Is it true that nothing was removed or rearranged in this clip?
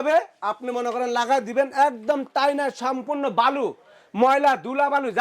yes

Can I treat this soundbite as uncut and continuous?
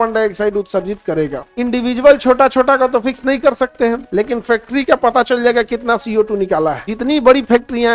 no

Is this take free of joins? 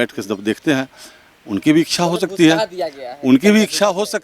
yes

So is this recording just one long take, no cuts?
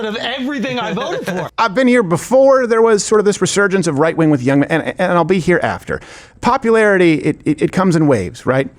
no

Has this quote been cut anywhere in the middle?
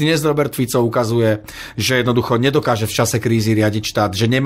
no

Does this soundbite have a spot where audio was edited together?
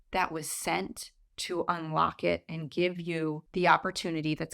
yes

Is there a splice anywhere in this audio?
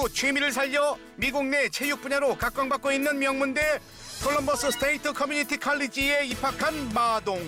no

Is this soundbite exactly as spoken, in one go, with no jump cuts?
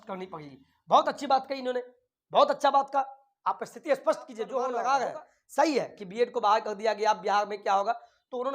no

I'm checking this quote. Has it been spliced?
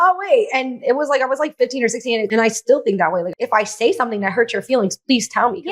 yes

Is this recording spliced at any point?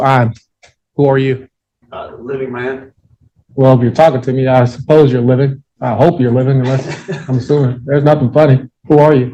no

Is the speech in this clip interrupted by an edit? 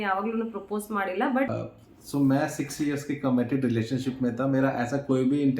yes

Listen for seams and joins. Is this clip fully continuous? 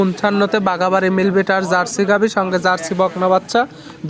yes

